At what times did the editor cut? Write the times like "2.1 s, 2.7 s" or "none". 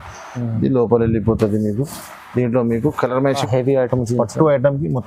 3.4 s